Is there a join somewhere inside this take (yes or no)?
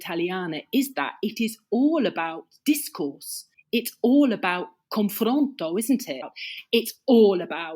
yes